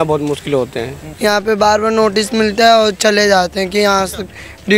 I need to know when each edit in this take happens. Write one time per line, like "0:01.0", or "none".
0:01.0